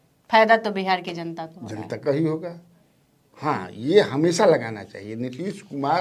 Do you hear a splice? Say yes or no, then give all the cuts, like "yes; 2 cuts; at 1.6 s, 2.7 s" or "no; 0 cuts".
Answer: no; 0 cuts